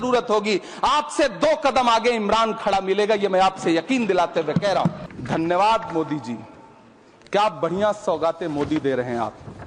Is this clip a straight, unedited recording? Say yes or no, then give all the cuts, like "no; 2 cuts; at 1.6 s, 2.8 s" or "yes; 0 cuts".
no; 1 cut; at 5.0 s